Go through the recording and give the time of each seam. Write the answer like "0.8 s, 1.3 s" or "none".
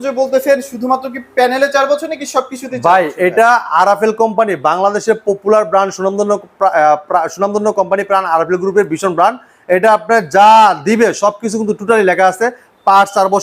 none